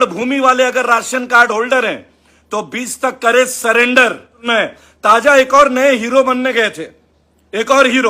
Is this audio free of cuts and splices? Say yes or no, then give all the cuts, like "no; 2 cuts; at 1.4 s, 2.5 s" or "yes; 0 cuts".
no; 1 cut; at 4.3 s